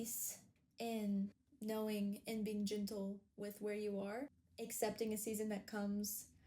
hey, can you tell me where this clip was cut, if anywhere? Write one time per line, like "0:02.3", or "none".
0:01.5
0:04.4